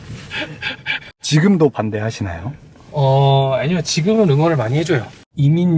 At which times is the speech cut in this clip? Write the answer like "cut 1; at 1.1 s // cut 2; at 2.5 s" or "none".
none